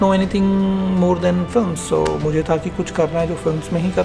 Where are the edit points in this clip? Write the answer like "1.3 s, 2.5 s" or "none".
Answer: none